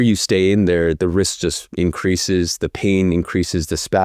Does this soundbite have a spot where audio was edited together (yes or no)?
no